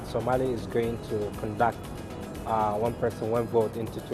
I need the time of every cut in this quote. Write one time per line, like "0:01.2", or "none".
none